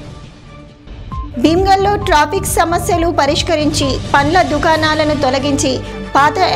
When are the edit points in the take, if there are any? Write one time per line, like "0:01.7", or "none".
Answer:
0:01.2

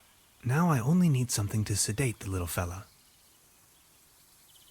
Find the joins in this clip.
0:01.7
0:02.9

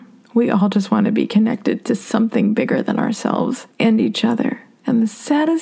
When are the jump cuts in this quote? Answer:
0:03.7
0:04.7

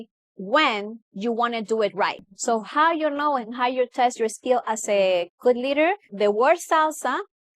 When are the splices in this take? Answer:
0:02.3
0:06.1

